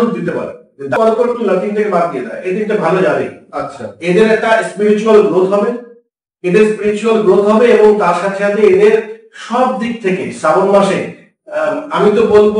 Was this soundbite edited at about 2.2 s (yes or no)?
no